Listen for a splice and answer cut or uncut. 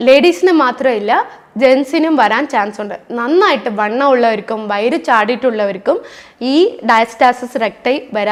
uncut